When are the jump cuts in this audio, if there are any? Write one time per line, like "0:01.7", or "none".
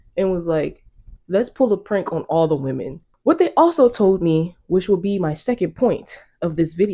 none